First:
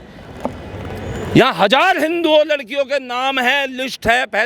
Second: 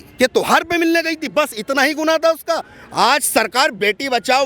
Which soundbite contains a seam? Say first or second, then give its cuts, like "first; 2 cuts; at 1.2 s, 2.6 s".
second; 1 cut; at 2.8 s